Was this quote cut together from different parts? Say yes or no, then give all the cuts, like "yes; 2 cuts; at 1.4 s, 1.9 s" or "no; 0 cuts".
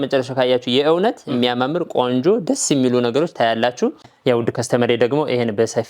yes; 1 cut; at 4.1 s